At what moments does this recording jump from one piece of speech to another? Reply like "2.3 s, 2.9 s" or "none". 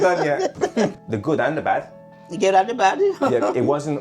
0.9 s